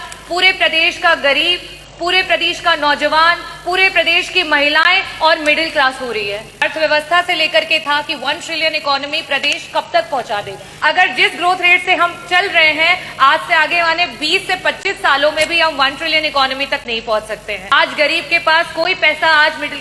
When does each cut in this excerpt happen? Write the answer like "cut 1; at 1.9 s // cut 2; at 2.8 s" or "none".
cut 1; at 6.6 s // cut 2; at 10.6 s // cut 3; at 17.7 s